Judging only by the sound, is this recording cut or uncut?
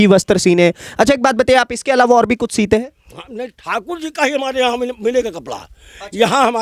uncut